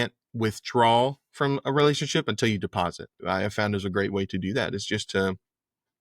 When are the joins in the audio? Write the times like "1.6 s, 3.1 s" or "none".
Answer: 3.2 s